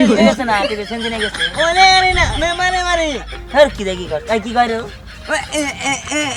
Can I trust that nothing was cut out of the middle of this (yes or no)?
yes